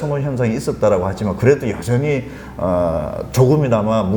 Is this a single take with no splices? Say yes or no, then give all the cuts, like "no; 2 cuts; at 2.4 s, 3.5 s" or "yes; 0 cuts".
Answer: yes; 0 cuts